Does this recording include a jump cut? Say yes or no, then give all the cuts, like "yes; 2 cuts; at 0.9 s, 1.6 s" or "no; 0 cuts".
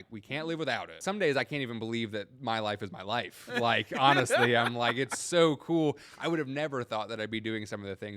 yes; 1 cut; at 1.0 s